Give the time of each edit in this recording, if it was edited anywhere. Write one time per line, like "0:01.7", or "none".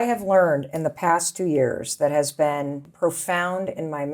0:02.9